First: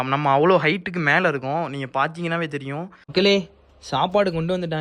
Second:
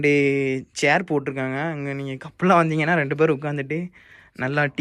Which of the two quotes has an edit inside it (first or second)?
first